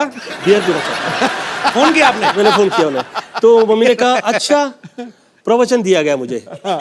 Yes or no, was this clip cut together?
no